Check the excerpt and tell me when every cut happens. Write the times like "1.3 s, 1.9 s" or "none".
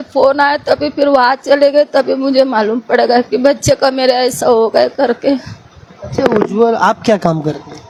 none